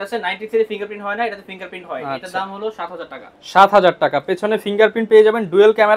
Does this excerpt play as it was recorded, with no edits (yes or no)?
yes